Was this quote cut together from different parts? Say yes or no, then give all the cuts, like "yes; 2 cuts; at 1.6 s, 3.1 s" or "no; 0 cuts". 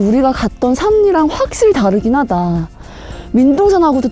no; 0 cuts